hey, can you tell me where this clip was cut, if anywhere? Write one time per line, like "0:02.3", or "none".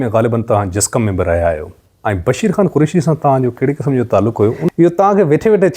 0:04.6

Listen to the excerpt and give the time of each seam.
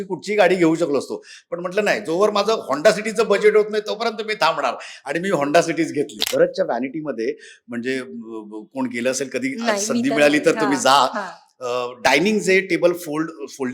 0:06.2

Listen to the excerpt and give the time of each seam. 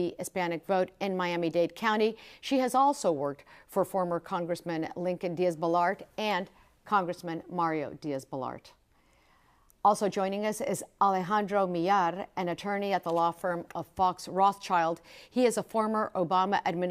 0:06.1

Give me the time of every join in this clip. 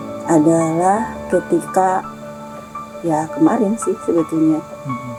none

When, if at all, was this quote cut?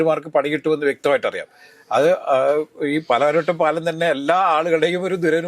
none

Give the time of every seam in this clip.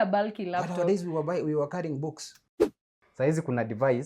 0:02.4

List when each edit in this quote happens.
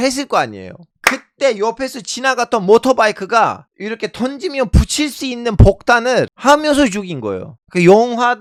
none

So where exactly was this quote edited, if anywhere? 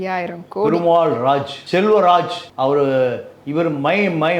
0:01.6
0:02.4

